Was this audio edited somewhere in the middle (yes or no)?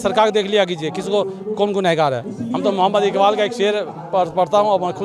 yes